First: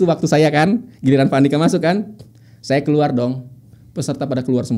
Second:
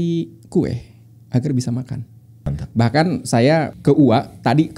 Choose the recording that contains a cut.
second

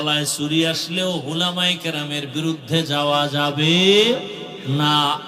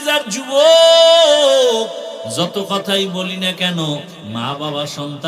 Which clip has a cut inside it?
second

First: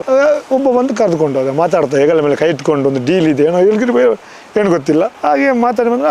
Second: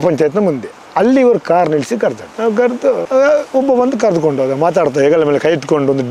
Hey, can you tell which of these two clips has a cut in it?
first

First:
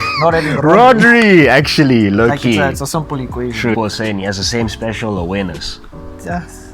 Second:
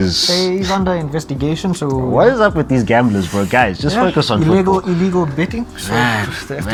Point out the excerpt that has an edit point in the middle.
first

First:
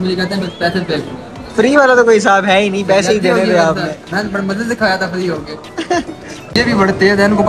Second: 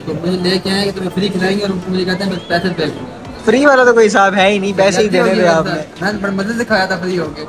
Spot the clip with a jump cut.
first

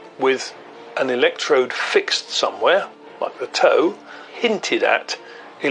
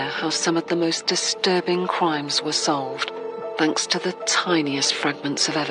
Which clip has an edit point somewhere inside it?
first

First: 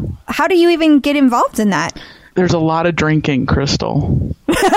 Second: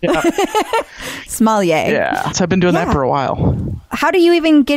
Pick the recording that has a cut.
second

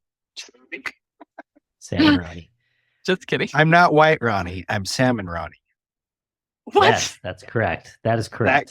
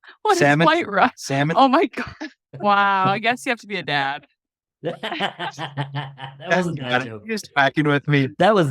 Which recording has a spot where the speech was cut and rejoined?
second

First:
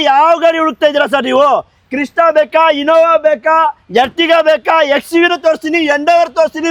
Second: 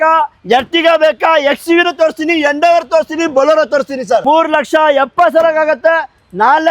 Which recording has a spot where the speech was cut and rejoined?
second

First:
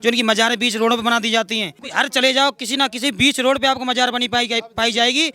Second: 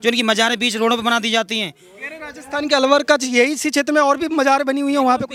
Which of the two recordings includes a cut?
first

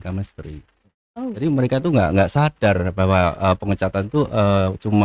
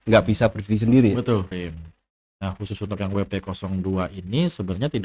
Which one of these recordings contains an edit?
second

